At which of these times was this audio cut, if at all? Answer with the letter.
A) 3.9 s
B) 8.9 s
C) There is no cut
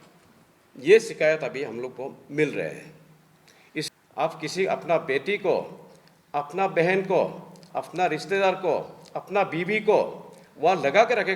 A